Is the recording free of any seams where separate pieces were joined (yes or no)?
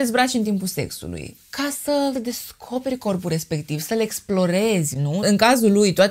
yes